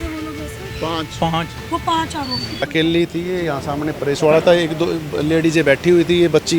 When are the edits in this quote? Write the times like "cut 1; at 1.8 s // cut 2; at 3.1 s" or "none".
cut 1; at 2.6 s